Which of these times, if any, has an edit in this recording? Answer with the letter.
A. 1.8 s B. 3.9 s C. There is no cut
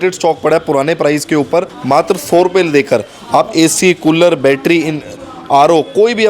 A